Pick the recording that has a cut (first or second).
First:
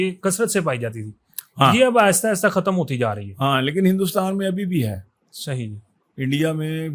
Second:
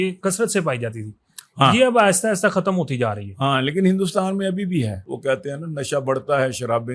second